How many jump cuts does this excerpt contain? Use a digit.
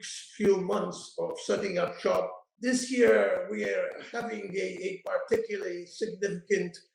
1